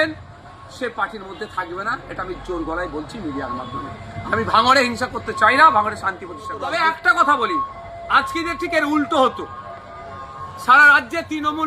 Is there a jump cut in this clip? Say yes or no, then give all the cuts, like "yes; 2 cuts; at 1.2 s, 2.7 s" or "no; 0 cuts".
yes; 1 cut; at 6.6 s